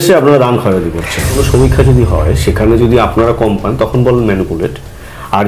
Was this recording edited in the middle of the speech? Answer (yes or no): yes